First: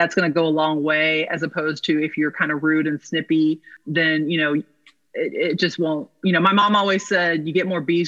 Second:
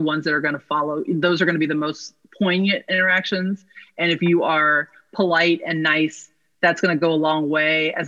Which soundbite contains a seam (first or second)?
first